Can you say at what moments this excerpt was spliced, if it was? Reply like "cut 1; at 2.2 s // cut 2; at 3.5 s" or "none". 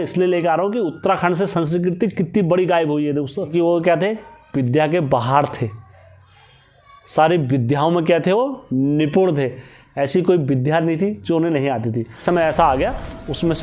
cut 1; at 3.5 s // cut 2; at 12.2 s